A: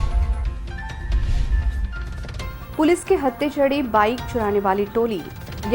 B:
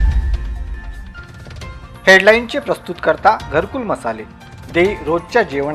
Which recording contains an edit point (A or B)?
B